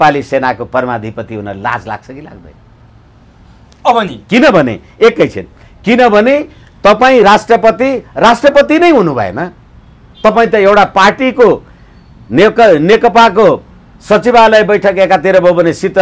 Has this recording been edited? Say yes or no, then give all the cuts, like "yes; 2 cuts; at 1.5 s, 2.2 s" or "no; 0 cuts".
no; 0 cuts